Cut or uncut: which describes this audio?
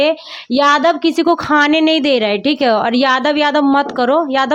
uncut